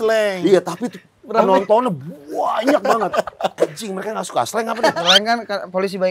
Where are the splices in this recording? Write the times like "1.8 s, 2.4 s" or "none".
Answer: 3.5 s, 5.0 s